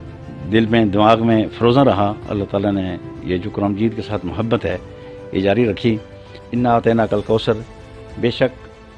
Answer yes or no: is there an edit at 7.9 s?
no